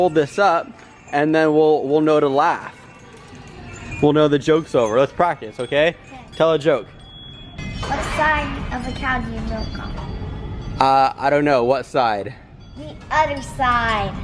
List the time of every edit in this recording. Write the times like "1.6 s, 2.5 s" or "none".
7.6 s

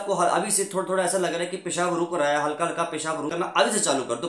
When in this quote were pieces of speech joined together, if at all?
3.3 s

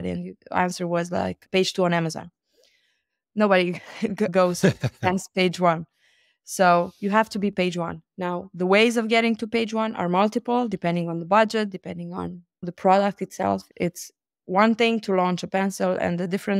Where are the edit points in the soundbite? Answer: none

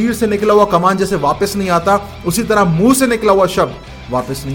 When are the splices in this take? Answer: none

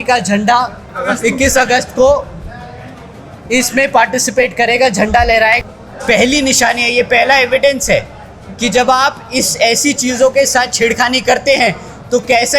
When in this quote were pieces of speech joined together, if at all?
5.6 s

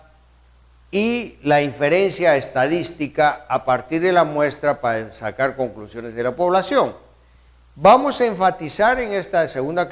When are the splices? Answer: none

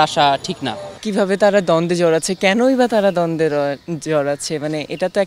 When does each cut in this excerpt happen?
0.9 s

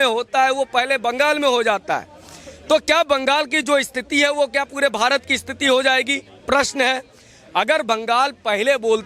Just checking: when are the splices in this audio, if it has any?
none

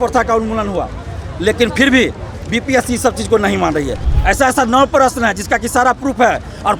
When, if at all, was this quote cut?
4.0 s

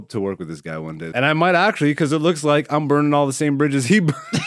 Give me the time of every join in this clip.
1.0 s

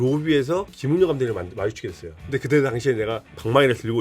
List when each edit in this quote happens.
2.2 s

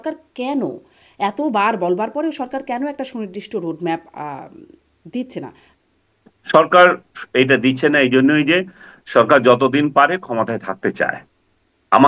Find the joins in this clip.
5.6 s

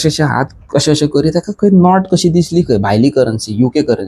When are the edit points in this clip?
none

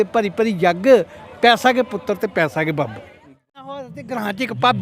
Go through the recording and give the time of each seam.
3.5 s

